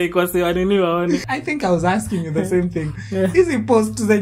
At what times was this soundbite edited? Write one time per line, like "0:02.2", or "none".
0:01.3